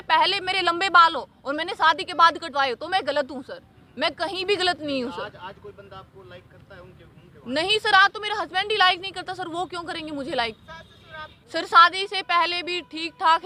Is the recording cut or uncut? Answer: uncut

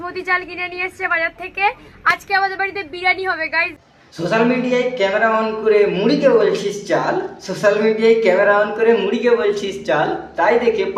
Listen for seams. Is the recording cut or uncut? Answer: uncut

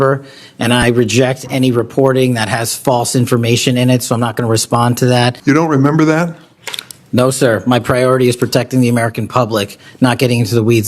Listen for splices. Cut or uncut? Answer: cut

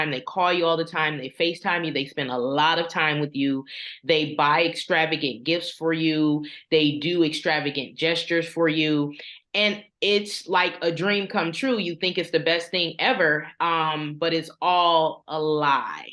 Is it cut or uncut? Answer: uncut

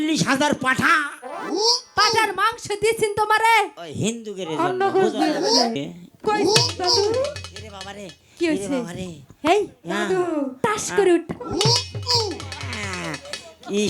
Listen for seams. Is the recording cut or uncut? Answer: cut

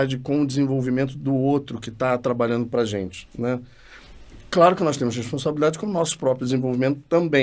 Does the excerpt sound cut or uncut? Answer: uncut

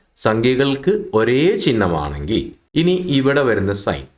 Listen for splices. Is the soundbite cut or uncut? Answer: cut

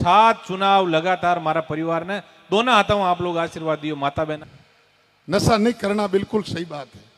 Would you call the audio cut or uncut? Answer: cut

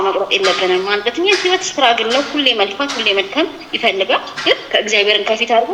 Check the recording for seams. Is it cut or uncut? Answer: uncut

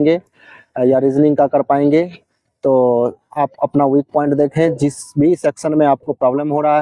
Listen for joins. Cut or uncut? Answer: uncut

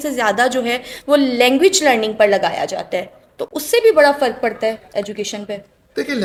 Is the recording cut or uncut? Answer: uncut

